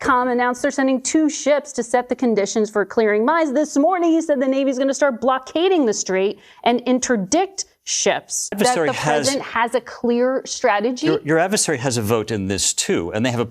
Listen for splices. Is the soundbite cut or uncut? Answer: cut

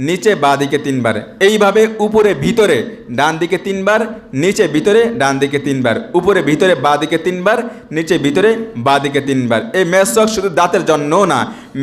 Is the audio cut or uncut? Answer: uncut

